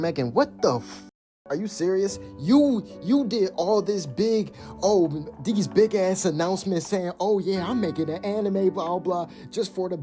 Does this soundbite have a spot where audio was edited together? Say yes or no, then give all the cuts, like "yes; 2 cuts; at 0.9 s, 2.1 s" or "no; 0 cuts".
yes; 1 cut; at 1.1 s